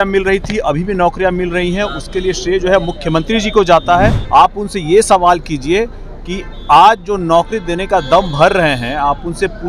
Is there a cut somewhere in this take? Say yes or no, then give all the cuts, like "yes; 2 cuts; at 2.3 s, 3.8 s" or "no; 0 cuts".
yes; 1 cut; at 4.2 s